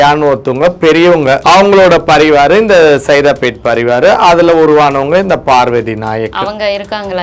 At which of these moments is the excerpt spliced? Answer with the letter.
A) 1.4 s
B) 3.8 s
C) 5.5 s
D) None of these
A